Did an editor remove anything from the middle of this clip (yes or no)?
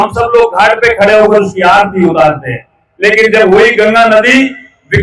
no